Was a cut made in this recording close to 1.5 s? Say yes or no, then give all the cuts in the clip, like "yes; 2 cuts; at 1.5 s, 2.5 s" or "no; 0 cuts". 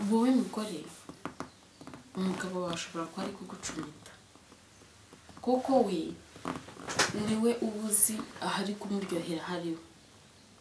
no; 0 cuts